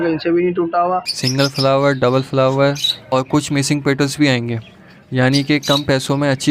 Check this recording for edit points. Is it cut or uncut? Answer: cut